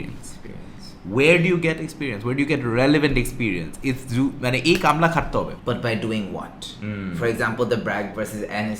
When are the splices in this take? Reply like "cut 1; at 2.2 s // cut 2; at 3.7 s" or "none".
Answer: cut 1; at 5.6 s